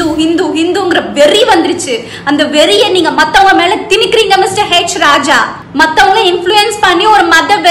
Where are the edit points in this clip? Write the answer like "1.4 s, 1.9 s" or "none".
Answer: 5.6 s